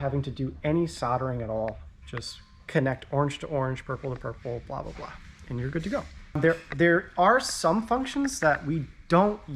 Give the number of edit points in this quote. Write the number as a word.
zero